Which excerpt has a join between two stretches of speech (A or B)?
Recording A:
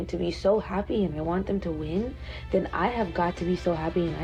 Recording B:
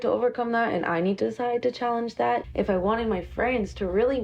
B